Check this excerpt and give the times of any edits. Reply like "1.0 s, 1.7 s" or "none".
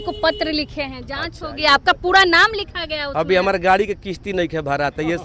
none